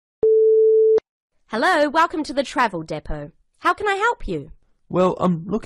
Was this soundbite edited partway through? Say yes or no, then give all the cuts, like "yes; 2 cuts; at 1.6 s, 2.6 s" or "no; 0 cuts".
yes; 1 cut; at 1.0 s